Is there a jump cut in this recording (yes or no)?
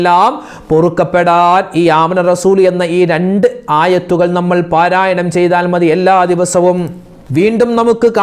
no